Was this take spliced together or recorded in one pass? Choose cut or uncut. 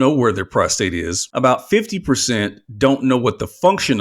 cut